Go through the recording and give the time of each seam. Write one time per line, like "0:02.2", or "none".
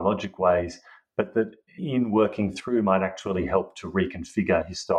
0:01.8